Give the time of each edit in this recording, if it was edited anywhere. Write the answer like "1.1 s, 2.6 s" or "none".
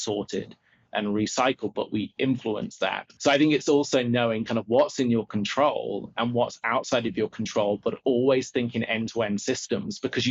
3.1 s